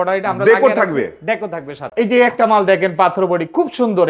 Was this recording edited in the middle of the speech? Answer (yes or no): yes